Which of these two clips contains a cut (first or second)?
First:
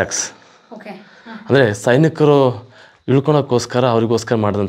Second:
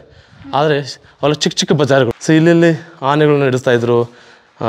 second